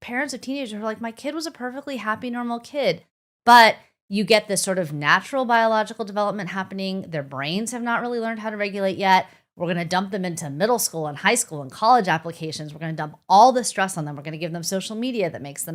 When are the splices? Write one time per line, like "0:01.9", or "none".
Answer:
none